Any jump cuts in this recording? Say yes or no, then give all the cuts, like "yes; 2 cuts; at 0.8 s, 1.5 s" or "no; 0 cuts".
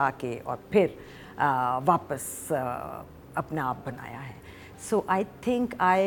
no; 0 cuts